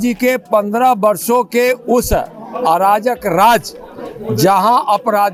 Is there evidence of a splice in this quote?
no; 0 cuts

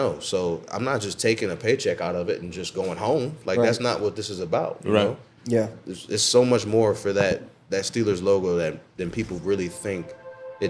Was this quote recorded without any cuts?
yes; 0 cuts

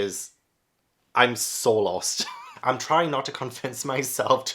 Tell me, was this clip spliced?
yes; 1 cut; at 2.4 s

